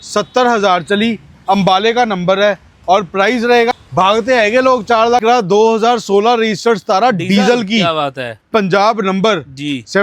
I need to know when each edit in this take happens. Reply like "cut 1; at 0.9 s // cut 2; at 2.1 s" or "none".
cut 1; at 3.7 s // cut 2; at 5.2 s